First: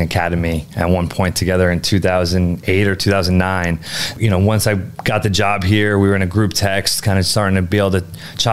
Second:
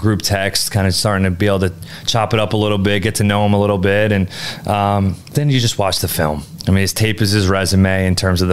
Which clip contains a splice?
first; 1 cut; at 4.1 s

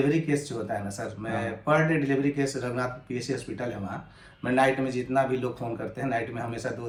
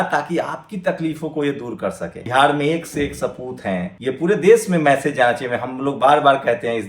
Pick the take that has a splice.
second; 2 cuts; at 2.2 s, 3.9 s

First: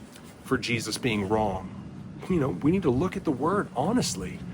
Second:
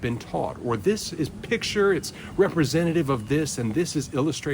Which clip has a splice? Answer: first; 1 cut; at 2.1 s

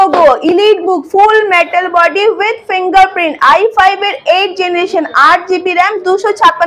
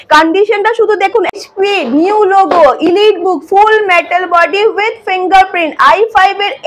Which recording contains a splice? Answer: second; 1 cut; at 1.3 s

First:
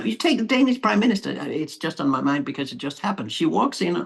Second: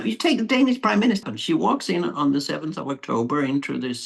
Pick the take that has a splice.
second; 1 cut; at 1.3 s

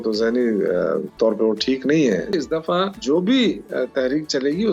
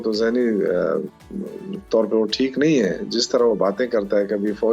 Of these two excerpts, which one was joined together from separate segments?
first; 2 cuts; at 1.1 s, 2.4 s

